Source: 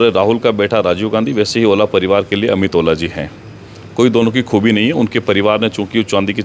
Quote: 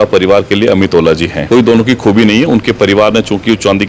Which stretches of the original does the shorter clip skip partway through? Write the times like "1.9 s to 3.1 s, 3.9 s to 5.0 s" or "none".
3.2 s to 3.8 s